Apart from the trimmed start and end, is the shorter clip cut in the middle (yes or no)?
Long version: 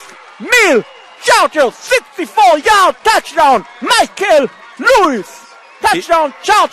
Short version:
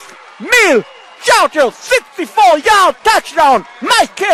no